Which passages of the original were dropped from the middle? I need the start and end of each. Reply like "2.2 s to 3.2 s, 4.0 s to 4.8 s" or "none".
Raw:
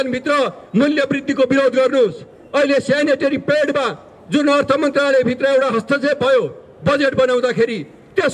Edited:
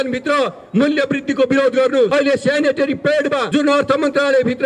2.1 s to 2.5 s, 3.9 s to 4.3 s